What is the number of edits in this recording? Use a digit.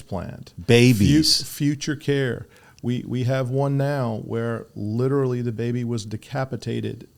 0